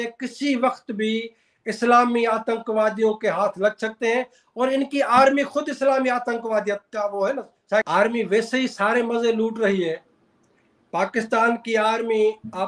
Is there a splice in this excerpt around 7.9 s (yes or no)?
yes